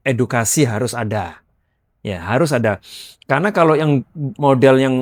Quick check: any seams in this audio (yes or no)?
no